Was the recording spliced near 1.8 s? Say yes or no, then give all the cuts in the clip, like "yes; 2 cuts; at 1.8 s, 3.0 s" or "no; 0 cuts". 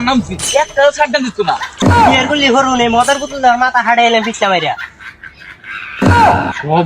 yes; 1 cut; at 1.8 s